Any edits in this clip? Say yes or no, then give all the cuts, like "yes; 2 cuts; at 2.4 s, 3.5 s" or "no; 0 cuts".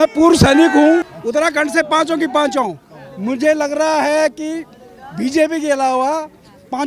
yes; 1 cut; at 1.2 s